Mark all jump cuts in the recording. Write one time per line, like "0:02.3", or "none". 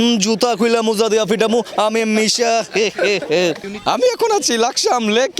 0:03.7